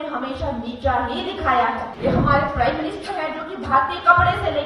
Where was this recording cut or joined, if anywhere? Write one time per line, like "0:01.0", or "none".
0:01.9